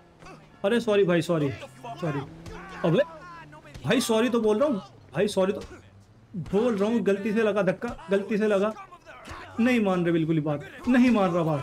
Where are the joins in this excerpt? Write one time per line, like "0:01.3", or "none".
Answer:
none